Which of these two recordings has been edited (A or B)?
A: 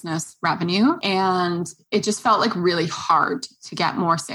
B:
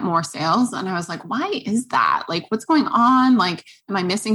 A